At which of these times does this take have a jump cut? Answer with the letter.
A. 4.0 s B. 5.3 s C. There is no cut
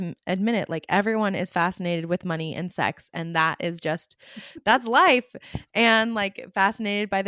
C